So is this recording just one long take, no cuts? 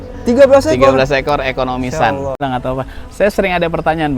no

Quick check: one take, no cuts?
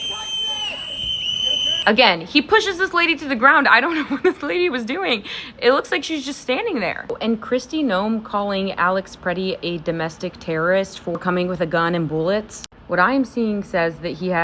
no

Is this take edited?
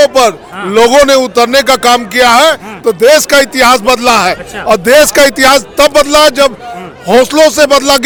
no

